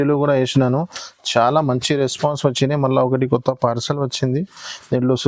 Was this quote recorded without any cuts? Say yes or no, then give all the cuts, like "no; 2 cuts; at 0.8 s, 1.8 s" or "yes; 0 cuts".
yes; 0 cuts